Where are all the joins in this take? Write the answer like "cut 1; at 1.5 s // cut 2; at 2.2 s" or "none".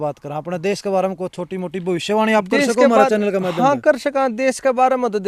none

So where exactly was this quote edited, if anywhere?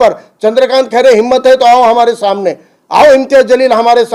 none

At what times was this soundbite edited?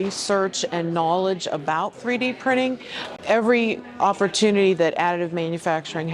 cut 1; at 3.1 s

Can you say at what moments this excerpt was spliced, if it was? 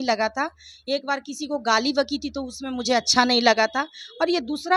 none

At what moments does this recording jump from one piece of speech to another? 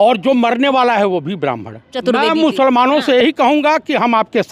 cut 1; at 1.9 s

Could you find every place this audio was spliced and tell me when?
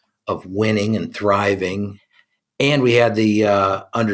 cut 1; at 2.0 s

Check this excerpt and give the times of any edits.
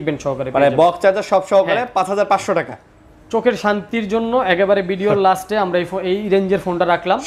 none

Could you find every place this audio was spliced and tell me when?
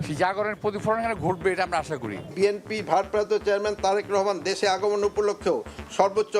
cut 1; at 2.3 s

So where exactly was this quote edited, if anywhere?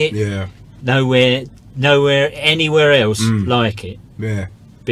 none

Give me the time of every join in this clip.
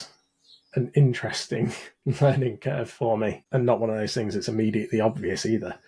cut 1; at 3.4 s

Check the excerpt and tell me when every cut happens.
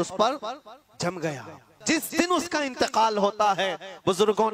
cut 1; at 1.7 s

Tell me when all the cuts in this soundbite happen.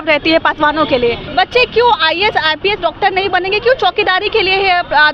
cut 1; at 1.2 s

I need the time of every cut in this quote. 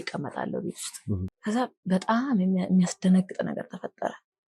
cut 1; at 1.3 s

